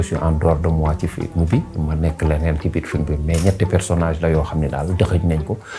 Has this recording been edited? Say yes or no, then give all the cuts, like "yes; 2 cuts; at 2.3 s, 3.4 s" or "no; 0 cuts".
no; 0 cuts